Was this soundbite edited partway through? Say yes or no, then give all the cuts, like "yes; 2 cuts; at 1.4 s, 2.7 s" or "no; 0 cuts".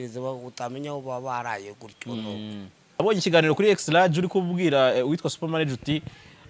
yes; 1 cut; at 3.0 s